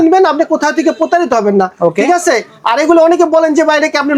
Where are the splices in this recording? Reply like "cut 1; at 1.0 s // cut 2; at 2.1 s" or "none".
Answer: none